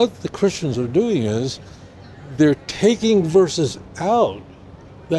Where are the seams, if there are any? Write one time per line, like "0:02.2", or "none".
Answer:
none